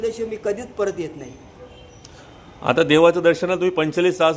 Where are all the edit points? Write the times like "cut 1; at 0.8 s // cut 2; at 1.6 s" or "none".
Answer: none